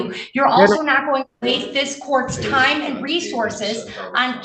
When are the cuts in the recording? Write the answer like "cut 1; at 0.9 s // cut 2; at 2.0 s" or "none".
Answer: none